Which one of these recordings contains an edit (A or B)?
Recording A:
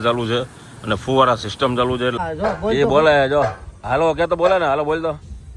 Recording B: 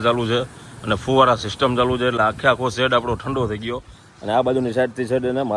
A